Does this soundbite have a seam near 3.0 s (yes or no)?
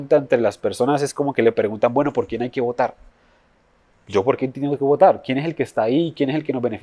no